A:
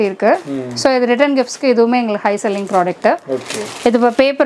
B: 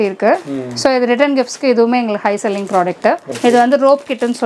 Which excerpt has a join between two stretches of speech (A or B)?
B